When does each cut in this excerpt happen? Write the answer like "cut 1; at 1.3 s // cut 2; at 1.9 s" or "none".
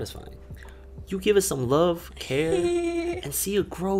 none

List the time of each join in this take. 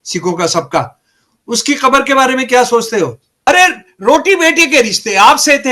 cut 1; at 3.3 s

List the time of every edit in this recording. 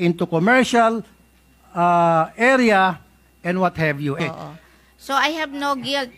cut 1; at 4.2 s

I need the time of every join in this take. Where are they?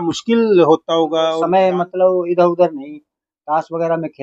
cut 1; at 1.3 s

